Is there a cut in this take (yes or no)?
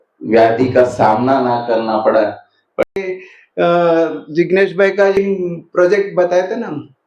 yes